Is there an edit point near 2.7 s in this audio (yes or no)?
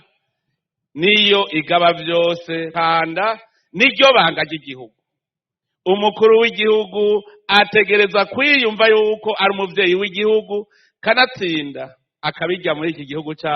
yes